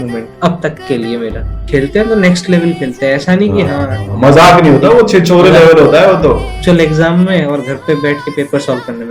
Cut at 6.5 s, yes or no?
yes